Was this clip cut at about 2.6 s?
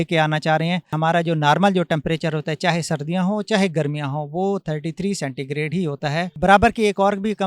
no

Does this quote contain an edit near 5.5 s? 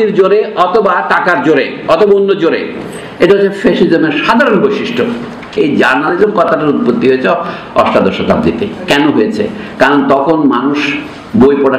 yes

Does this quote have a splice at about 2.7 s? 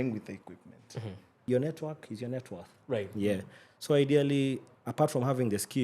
no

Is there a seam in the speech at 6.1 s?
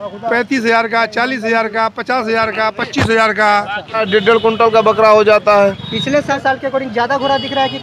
yes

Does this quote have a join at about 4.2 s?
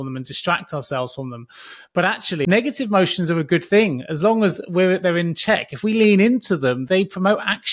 no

